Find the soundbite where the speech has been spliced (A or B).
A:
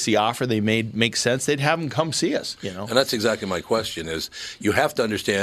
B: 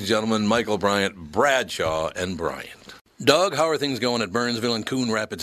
B